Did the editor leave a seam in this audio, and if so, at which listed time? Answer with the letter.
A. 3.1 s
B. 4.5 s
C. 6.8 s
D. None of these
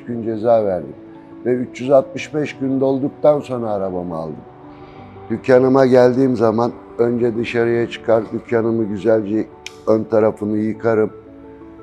B